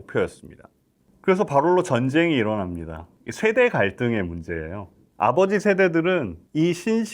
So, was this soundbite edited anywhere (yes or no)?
yes